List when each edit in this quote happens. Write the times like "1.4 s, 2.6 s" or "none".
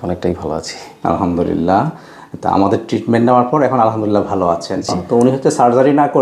5.0 s